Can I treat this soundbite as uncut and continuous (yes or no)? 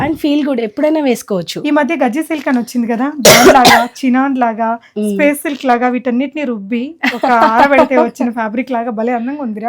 yes